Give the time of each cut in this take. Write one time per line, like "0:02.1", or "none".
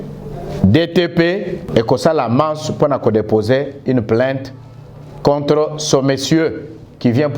0:01.6